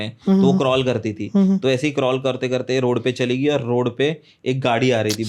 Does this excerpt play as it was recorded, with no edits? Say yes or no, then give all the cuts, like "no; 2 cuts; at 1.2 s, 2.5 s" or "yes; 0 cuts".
yes; 0 cuts